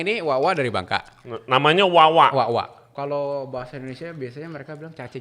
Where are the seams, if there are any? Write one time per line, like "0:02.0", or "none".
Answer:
0:02.9